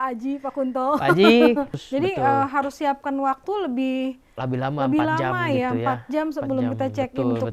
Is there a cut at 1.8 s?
yes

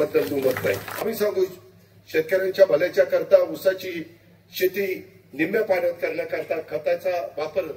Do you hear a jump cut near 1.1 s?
yes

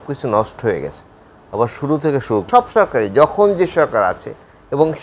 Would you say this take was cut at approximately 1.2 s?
no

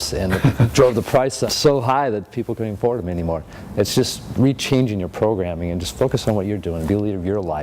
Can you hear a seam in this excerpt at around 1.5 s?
yes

